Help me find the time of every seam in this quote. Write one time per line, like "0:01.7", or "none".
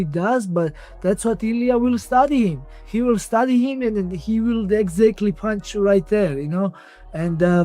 none